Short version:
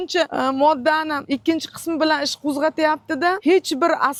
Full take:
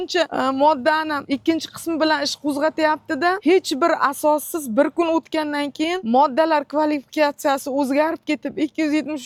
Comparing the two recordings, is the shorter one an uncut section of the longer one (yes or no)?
yes